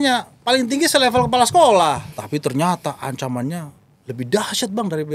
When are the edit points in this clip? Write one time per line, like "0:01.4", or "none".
0:02.2

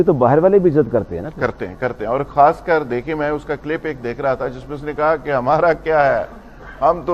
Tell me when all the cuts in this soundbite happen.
none

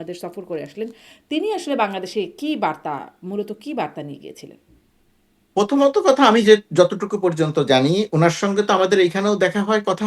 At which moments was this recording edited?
none

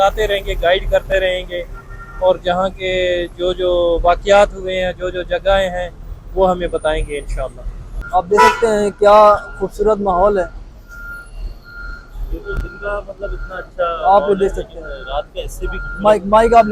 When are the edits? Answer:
none

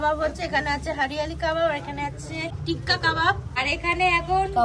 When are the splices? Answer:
none

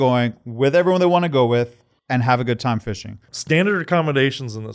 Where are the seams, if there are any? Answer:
0:03.1

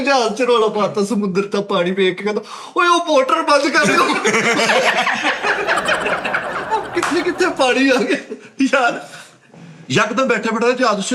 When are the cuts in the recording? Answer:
none

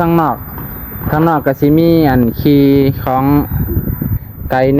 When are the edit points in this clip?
none

